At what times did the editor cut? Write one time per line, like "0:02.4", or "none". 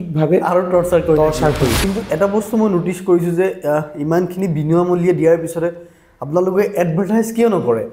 0:01.8